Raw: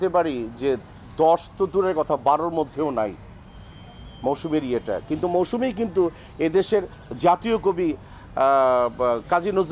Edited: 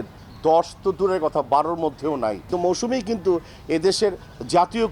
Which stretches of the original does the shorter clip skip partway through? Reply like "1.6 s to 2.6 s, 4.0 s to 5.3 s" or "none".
3.2 s to 5.2 s